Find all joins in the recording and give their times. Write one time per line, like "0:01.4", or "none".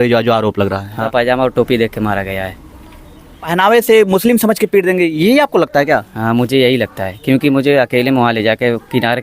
0:01.1
0:03.4